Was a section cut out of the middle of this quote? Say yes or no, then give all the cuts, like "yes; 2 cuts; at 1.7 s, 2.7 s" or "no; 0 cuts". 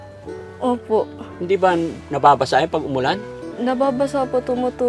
yes; 1 cut; at 3.4 s